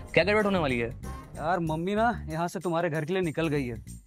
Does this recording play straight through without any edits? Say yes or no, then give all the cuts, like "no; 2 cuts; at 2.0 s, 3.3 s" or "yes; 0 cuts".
yes; 0 cuts